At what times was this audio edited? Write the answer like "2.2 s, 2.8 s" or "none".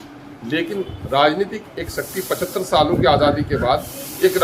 none